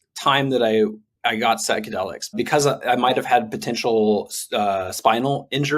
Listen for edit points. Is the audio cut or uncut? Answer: cut